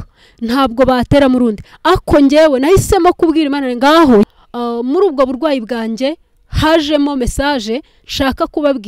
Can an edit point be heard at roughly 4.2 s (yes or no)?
yes